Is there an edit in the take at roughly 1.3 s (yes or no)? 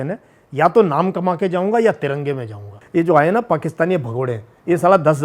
no